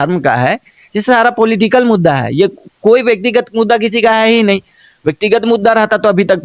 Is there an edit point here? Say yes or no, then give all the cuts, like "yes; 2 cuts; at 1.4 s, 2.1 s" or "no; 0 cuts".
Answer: no; 0 cuts